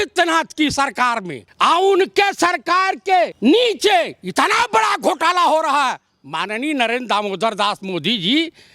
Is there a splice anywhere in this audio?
yes; 2 cuts; at 1.4 s, 3.3 s

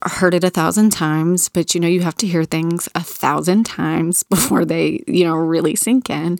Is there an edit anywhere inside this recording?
no; 0 cuts

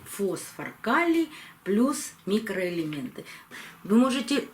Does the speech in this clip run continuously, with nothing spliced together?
no; 1 cut; at 3.4 s

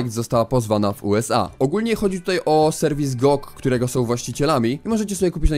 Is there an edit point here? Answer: yes; 1 cut; at 3.1 s

